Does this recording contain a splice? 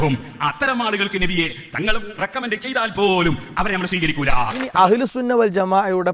yes; 1 cut; at 4.6 s

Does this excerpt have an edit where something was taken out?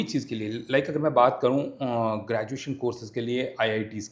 no; 0 cuts

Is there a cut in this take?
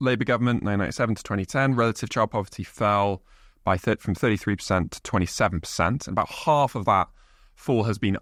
no; 0 cuts

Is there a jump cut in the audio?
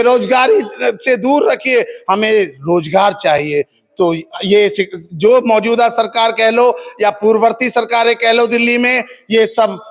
no; 0 cuts

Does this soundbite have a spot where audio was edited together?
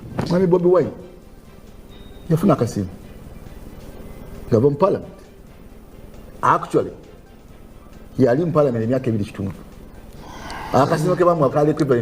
no; 0 cuts

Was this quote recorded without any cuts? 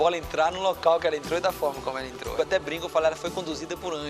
no; 1 cut; at 2.3 s

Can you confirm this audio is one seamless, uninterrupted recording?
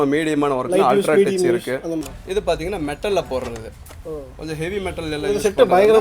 no; 1 cut; at 2.1 s

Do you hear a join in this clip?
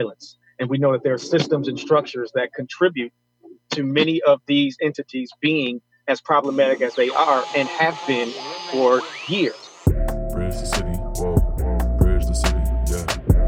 yes; 1 cut; at 9.7 s

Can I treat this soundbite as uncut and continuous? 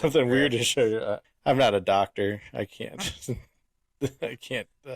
no; 1 cut; at 1.2 s

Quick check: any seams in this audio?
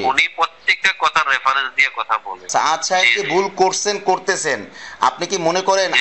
yes; 1 cut; at 2.5 s

